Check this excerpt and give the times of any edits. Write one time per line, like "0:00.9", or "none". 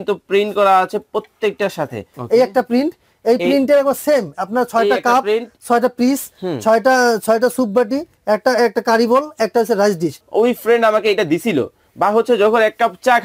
0:02.1
0:10.2